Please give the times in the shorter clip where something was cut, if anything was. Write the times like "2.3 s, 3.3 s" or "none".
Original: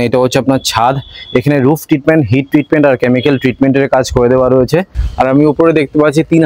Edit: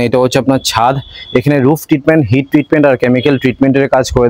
none